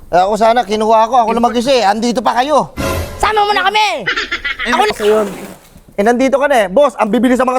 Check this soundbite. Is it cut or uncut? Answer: cut